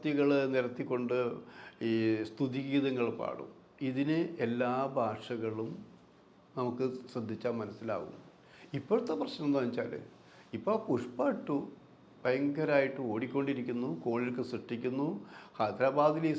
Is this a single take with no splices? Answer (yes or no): yes